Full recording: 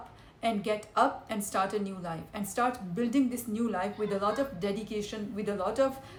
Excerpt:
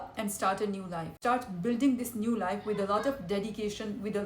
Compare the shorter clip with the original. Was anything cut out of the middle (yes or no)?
yes